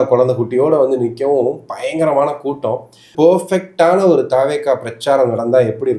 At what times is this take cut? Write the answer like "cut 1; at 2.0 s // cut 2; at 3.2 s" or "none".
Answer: cut 1; at 3.1 s